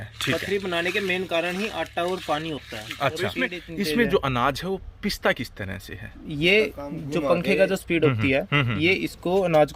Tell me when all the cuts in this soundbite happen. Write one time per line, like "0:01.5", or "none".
0:03.6